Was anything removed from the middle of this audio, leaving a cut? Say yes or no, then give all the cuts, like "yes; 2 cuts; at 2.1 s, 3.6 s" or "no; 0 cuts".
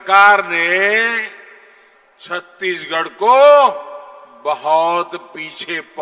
no; 0 cuts